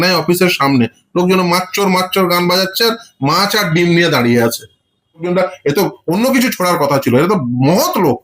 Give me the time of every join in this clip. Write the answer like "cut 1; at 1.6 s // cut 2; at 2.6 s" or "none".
cut 1; at 5.2 s